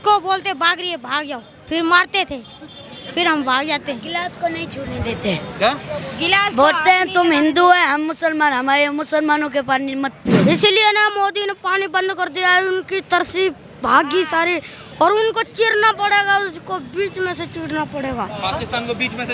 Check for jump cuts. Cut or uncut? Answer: cut